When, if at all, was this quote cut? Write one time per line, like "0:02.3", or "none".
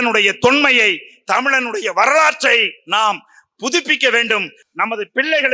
none